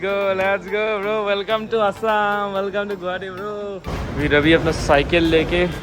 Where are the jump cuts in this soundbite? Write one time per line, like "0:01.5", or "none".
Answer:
0:03.9